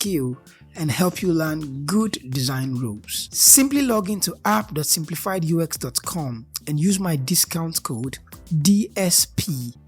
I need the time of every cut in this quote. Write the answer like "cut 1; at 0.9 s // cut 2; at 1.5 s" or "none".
none